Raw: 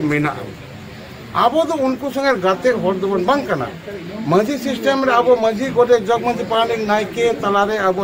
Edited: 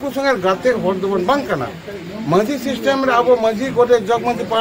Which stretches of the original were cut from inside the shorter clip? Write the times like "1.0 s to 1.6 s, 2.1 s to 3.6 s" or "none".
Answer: none